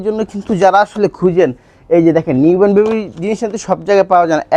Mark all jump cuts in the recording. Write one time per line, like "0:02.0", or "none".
none

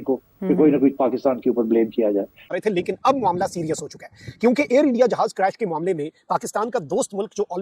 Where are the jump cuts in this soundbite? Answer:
0:02.5

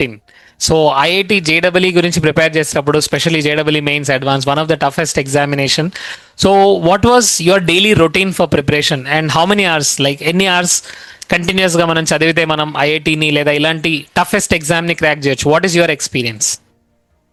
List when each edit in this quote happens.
none

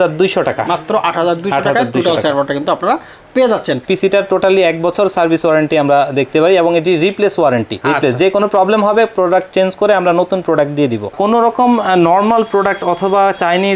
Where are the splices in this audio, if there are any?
0:03.8
0:07.8
0:11.1

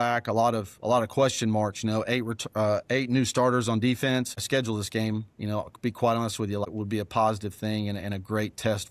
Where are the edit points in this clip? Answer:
0:04.4
0:06.6

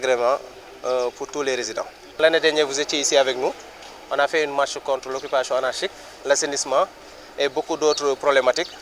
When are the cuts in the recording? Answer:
0:02.2

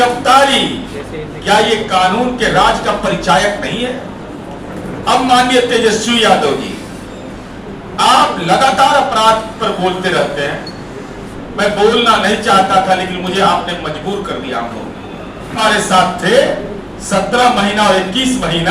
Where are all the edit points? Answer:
none

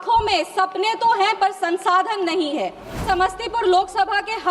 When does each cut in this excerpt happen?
0:02.9

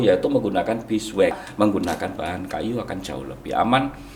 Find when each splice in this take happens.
0:01.4

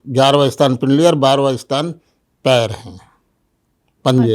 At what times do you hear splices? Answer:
none

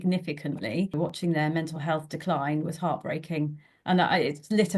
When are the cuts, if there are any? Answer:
0:01.2

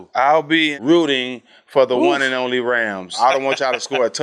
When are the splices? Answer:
0:00.9
0:03.1

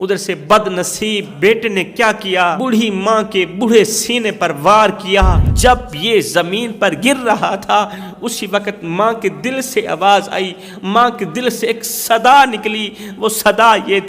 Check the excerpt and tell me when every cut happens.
0:01.3
0:02.6
0:05.4

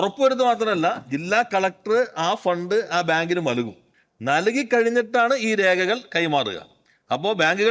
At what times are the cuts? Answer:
none

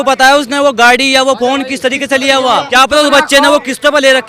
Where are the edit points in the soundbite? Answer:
0:02.7

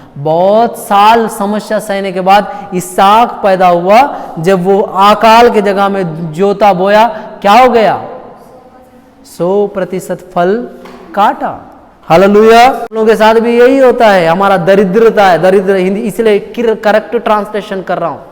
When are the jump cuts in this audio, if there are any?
0:13.0

